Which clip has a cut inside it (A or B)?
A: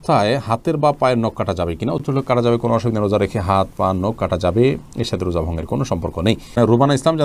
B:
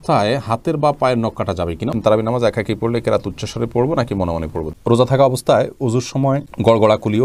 B